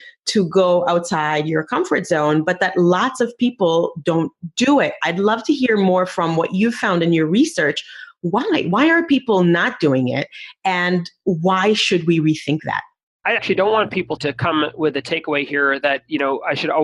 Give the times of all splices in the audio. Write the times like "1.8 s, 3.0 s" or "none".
none